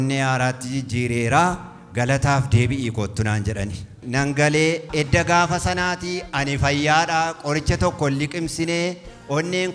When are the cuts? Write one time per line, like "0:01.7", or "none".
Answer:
0:04.0